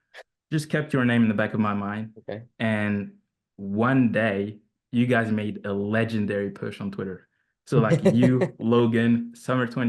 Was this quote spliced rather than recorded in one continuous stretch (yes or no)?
no